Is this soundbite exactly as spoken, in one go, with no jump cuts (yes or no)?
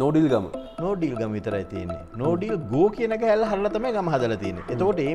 yes